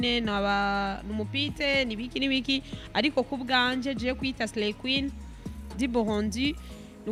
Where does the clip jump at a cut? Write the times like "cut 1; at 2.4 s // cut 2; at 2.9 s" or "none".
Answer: none